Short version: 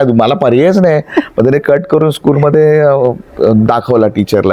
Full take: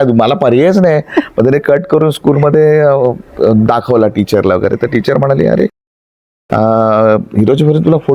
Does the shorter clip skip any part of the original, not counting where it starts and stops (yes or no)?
no